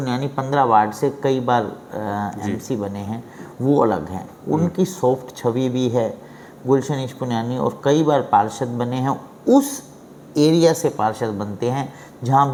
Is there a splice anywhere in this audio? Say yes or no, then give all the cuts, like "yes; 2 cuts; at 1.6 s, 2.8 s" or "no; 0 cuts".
no; 0 cuts